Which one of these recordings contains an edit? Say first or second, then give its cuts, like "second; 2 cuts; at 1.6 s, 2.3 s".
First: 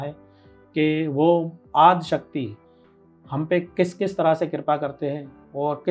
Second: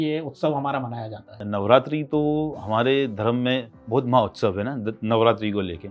second; 2 cuts; at 1.4 s, 3.7 s